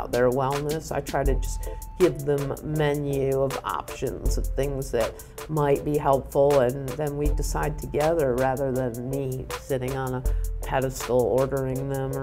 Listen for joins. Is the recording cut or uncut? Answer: uncut